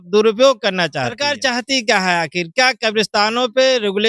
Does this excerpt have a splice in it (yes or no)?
yes